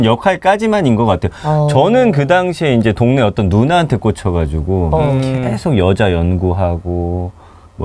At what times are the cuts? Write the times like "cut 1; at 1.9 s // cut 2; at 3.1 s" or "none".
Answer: none